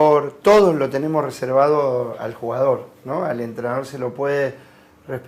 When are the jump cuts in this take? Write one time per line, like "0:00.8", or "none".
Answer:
0:01.4